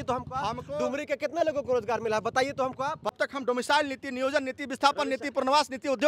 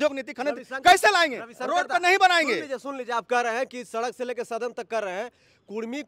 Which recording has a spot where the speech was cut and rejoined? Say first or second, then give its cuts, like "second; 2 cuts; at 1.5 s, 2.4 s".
first; 1 cut; at 3.1 s